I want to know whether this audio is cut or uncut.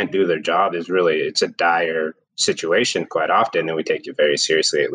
cut